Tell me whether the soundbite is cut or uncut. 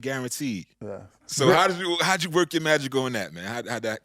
cut